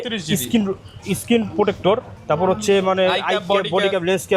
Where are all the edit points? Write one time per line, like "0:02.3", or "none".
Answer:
0:02.1